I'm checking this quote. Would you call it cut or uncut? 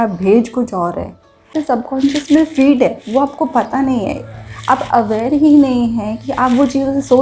cut